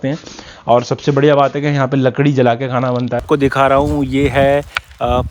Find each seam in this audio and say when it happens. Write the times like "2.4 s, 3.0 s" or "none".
3.2 s